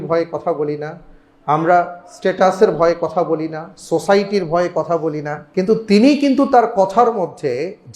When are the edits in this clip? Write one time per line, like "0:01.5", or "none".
0:05.4